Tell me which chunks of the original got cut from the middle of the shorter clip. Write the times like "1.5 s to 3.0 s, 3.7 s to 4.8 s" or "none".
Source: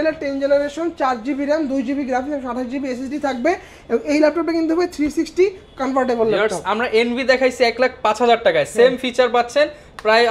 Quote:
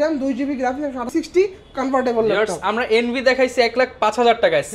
2.6 s to 5.1 s